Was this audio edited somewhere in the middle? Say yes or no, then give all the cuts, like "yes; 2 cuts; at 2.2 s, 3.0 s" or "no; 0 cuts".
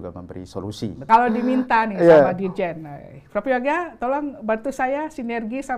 yes; 1 cut; at 1.1 s